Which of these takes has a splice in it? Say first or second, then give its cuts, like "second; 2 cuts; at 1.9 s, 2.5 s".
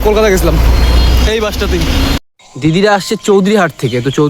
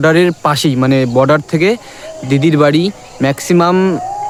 first; 1 cut; at 2.3 s